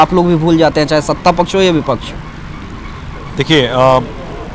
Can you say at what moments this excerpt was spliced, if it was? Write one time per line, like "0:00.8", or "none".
none